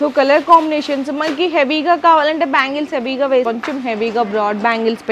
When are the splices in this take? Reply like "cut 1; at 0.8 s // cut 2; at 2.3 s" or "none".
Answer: cut 1; at 3.4 s